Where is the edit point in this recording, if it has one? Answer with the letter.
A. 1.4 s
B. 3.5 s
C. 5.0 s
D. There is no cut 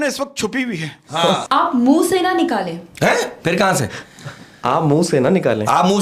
A